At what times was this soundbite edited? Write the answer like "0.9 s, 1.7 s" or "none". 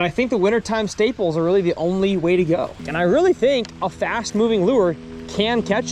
2.8 s